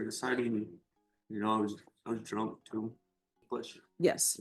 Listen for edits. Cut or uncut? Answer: cut